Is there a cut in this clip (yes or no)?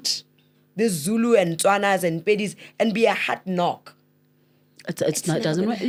no